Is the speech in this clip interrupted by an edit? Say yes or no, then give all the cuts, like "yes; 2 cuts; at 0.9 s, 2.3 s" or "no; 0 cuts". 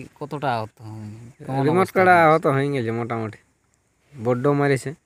no; 0 cuts